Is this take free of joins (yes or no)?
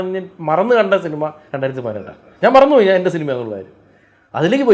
yes